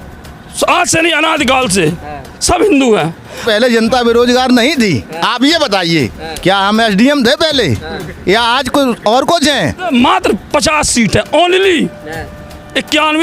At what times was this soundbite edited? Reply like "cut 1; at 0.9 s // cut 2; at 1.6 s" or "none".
cut 1; at 3.4 s // cut 2; at 9.8 s